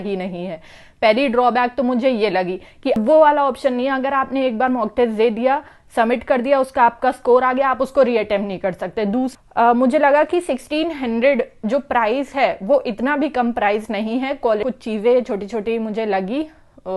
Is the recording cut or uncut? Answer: cut